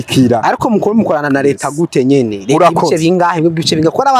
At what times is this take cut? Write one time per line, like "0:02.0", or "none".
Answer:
none